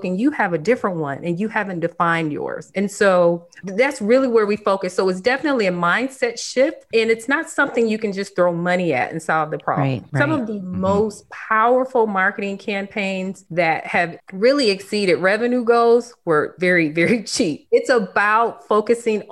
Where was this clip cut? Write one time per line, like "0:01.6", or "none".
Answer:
0:16.5
0:17.6